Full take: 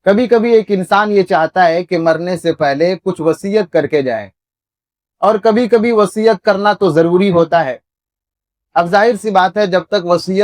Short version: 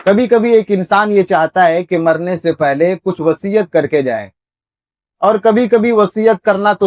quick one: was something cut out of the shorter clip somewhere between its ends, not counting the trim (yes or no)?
no